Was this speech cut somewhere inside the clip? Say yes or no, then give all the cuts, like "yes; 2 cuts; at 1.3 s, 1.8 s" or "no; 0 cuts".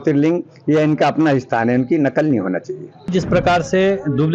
yes; 1 cut; at 3.1 s